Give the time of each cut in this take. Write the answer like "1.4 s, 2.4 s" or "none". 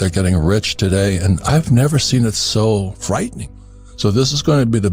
3.4 s